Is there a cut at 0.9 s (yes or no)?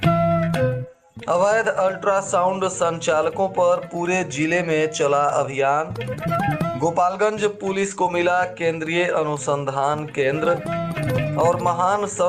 yes